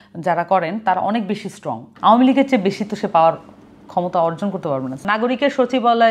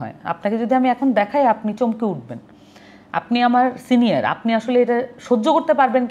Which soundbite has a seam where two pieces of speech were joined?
first; 2 cuts; at 1.9 s, 5.0 s

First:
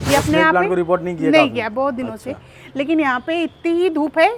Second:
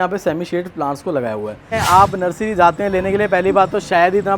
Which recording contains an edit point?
second; 1 cut; at 1.7 s

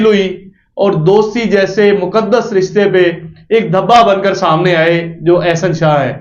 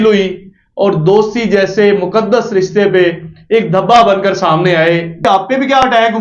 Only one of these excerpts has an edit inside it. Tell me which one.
second; 1 cut; at 5.2 s

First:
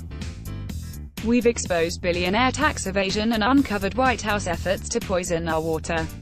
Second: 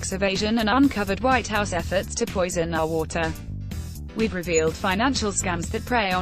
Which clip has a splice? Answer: first; 1 cut; at 1.2 s

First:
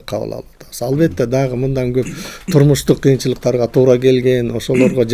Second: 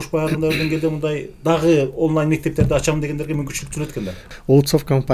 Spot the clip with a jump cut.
second; 1 cut; at 4.2 s

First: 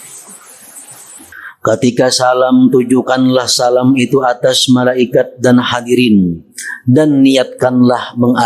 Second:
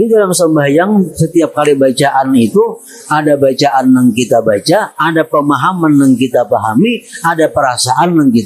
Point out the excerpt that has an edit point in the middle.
first; 1 cut; at 1.4 s

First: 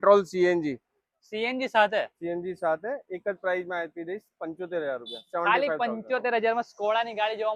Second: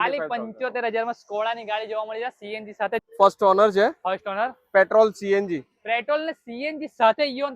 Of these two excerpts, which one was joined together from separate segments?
second; 1 cut; at 3.0 s

